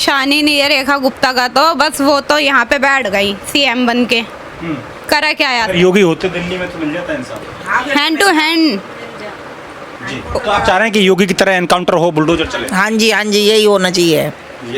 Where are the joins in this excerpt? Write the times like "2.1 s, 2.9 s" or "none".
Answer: none